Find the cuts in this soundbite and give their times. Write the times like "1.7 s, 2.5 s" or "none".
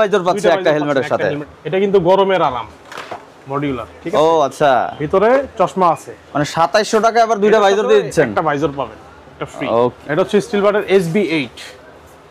1.4 s, 6.2 s, 10.0 s